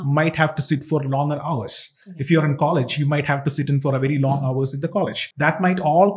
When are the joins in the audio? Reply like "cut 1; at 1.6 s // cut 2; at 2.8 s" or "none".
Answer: cut 1; at 5.2 s